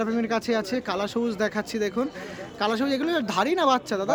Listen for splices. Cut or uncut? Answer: uncut